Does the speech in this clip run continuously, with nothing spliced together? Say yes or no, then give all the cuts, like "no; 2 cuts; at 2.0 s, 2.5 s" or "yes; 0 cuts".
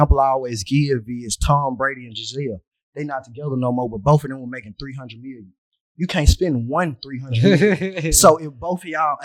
yes; 0 cuts